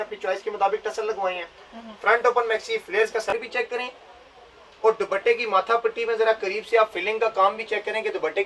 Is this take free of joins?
no; 1 cut; at 3.3 s

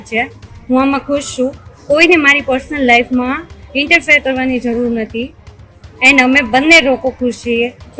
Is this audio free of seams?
yes; 0 cuts

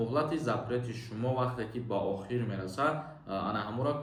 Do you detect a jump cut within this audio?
no; 0 cuts

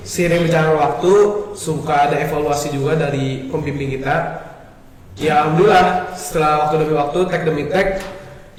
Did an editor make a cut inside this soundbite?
no; 0 cuts

